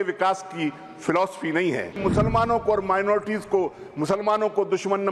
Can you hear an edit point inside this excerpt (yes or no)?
yes